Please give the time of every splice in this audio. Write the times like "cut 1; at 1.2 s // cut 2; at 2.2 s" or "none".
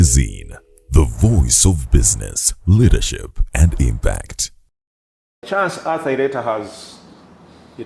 cut 1; at 5.4 s